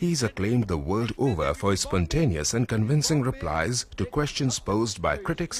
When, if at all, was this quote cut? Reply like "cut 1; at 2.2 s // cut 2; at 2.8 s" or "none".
cut 1; at 4.5 s

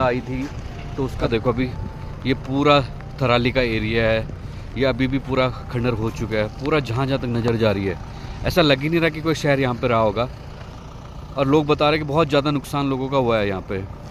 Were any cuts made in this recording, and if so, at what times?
none

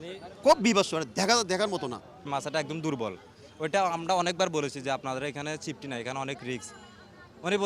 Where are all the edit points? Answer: cut 1; at 2.3 s

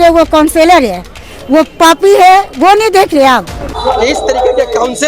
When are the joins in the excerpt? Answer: cut 1; at 3.8 s

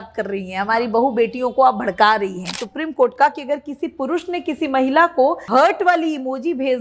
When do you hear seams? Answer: cut 1; at 2.7 s // cut 2; at 5.4 s

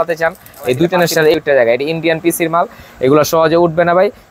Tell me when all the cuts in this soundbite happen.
cut 1; at 1.3 s

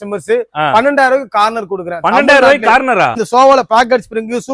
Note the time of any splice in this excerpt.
cut 1; at 3.2 s

